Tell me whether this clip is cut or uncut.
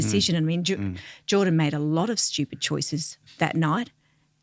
cut